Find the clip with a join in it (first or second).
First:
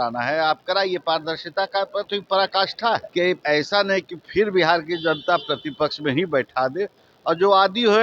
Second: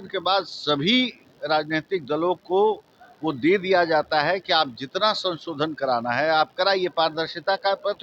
first